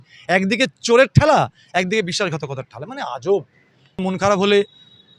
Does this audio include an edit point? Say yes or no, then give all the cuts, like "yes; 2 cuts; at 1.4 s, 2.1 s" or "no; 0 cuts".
yes; 1 cut; at 4.0 s